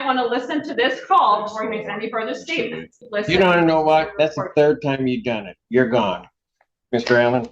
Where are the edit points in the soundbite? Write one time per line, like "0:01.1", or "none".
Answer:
0:03.0